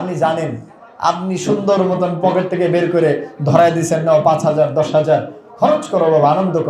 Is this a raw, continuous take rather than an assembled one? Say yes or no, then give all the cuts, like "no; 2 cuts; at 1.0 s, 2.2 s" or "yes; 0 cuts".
yes; 0 cuts